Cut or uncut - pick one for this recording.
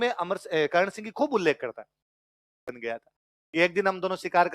cut